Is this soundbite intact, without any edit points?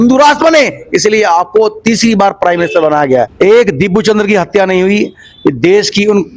no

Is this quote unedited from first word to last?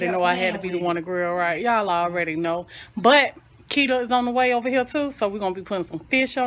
yes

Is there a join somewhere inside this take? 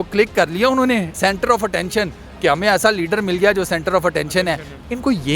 yes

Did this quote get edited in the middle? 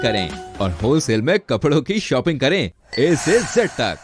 no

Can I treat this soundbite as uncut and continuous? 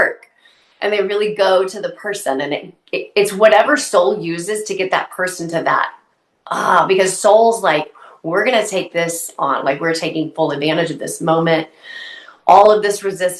yes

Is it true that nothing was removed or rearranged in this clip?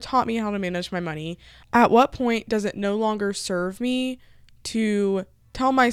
no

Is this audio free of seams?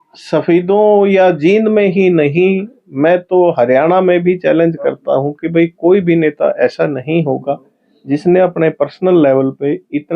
yes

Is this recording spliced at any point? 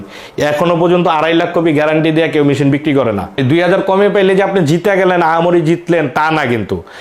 yes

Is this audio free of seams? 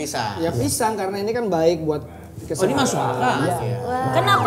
no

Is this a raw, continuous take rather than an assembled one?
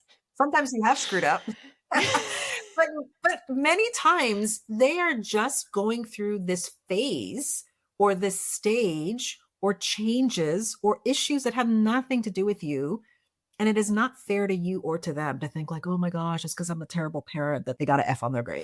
no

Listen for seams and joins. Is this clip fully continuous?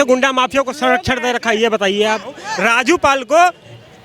no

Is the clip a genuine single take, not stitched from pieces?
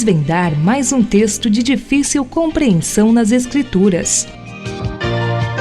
no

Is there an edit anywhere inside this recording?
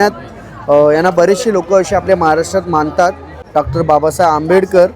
yes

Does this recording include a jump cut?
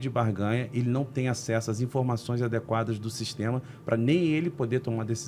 no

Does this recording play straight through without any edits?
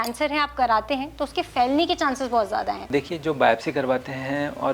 no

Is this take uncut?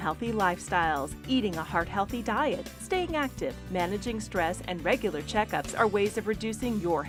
yes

